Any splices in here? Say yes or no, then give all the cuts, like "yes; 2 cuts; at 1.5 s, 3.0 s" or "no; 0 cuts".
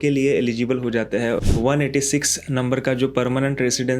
yes; 1 cut; at 1.4 s